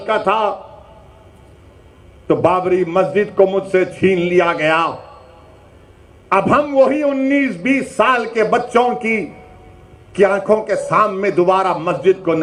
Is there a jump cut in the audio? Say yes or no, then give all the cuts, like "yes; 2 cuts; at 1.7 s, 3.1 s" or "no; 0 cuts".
no; 0 cuts